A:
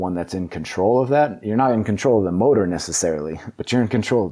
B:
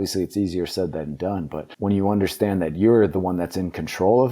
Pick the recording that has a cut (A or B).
B